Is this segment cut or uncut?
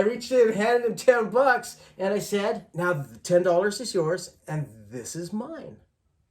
cut